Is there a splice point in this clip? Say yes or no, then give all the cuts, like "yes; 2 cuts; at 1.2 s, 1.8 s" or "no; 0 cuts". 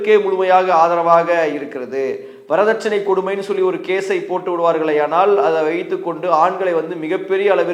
no; 0 cuts